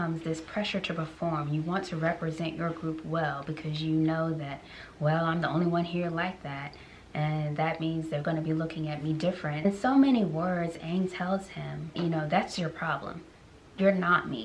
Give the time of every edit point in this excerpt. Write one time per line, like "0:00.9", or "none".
0:09.6